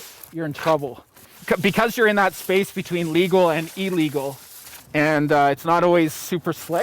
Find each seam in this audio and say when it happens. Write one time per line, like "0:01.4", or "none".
0:01.3
0:04.7